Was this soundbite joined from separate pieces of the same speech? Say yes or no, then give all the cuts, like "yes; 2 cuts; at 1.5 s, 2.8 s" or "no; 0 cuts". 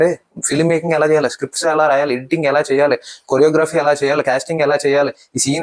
no; 0 cuts